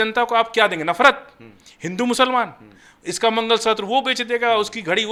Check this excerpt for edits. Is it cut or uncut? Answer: uncut